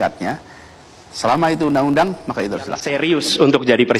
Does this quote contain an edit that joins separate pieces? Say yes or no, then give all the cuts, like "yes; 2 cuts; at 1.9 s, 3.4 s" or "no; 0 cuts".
yes; 1 cut; at 2.9 s